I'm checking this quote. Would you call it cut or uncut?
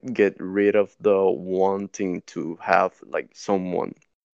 cut